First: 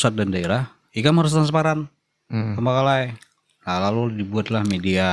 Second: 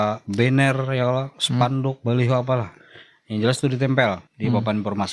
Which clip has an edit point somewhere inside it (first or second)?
second